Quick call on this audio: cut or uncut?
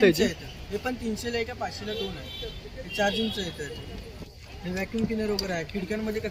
uncut